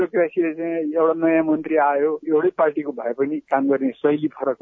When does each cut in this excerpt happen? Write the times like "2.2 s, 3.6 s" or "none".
2.2 s, 3.5 s